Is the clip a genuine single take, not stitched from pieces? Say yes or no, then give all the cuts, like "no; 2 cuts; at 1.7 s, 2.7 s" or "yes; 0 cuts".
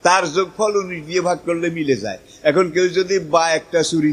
yes; 0 cuts